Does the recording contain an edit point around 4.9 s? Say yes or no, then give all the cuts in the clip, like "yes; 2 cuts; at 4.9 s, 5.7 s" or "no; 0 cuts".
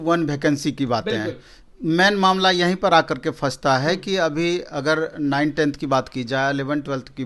no; 0 cuts